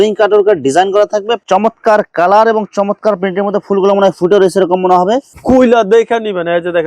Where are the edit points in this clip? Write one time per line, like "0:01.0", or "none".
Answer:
0:01.4
0:05.3